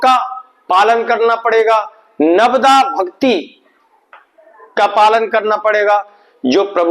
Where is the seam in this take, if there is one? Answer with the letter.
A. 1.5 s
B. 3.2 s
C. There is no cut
C